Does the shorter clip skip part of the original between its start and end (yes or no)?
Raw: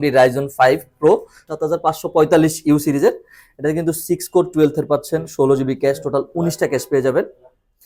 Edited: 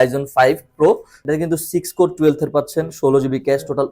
yes